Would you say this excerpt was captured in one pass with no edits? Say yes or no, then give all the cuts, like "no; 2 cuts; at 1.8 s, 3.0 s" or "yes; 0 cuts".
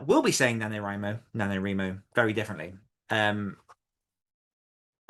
no; 1 cut; at 2.9 s